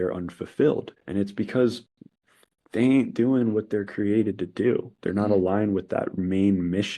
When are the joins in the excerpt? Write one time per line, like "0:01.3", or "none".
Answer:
0:01.0